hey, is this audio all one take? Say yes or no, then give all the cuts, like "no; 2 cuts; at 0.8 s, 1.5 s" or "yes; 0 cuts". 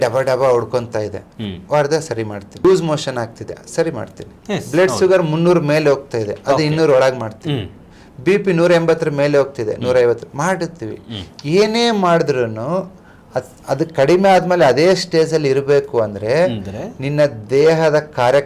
no; 1 cut; at 2.6 s